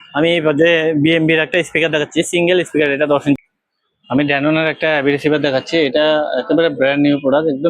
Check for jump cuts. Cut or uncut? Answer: cut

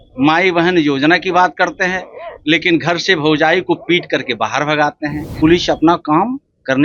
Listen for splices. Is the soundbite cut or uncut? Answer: cut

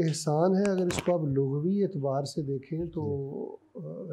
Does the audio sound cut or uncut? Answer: uncut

